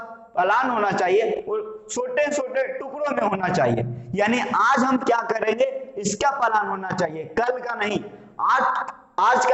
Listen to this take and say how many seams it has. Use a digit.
0